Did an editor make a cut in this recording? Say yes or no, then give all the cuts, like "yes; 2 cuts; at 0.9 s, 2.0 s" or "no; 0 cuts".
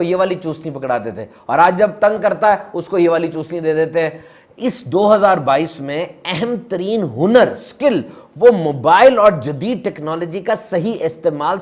no; 0 cuts